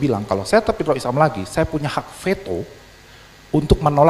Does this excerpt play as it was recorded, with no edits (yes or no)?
yes